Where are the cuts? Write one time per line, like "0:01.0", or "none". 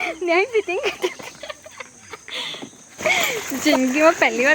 0:03.3

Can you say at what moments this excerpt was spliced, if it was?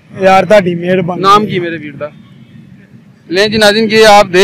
none

